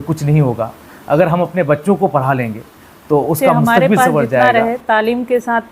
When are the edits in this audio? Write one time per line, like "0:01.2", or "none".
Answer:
0:04.5